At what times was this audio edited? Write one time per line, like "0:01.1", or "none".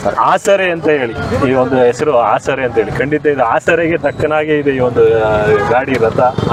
none

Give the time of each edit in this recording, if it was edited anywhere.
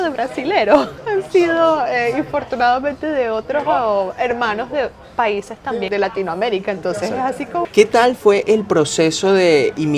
0:00.9
0:05.9
0:07.7

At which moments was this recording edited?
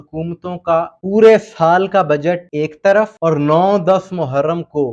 0:01.0
0:02.5
0:03.1

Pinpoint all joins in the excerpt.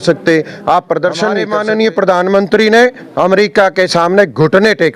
0:01.4

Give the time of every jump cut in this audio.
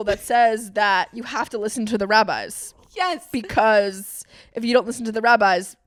none

